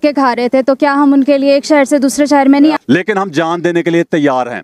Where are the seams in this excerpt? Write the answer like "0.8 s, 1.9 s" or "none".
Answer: 2.8 s